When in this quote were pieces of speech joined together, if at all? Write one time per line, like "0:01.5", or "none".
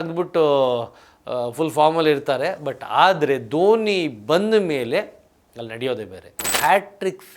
0:06.4